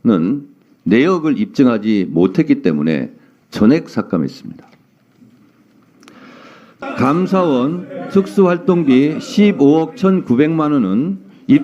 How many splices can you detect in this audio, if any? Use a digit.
1